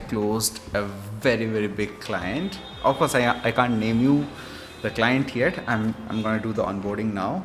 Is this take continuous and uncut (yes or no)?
yes